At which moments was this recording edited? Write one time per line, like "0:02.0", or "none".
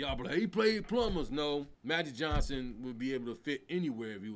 0:01.7